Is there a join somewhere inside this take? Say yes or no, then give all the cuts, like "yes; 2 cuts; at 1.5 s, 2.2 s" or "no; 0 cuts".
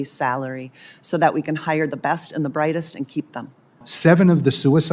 yes; 1 cut; at 3.9 s